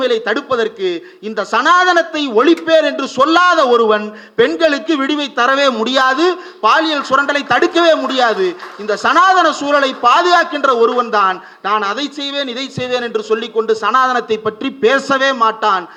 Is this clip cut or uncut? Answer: uncut